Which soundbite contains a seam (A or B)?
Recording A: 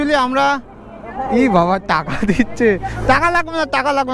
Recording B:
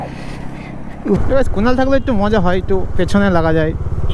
B